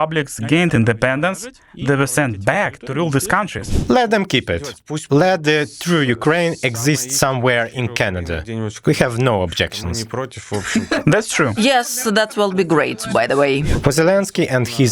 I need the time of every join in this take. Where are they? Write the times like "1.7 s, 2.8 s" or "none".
3.7 s, 13.7 s